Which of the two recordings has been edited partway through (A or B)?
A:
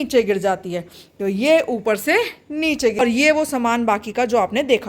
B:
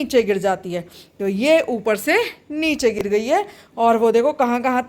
A